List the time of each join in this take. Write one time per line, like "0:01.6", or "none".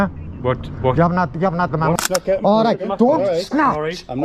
0:02.0